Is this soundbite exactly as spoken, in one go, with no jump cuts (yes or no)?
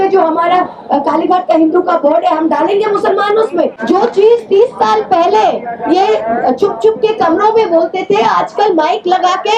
no